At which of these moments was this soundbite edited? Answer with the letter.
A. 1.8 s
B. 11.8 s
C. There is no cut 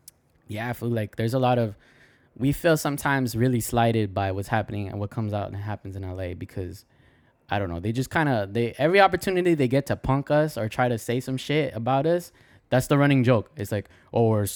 C